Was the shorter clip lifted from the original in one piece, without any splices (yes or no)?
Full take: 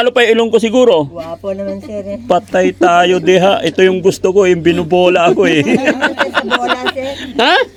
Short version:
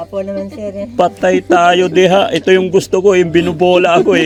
yes